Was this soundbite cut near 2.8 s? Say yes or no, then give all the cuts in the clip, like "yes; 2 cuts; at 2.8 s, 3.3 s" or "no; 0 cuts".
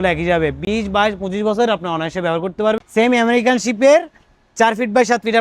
yes; 1 cut; at 2.8 s